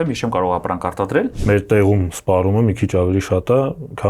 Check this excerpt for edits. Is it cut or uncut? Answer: cut